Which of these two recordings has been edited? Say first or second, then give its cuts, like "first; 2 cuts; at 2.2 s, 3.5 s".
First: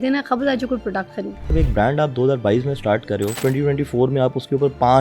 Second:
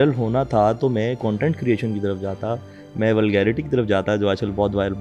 first; 2 cuts; at 1.4 s, 3.4 s